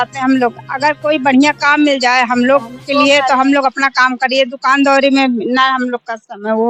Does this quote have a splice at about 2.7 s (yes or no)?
no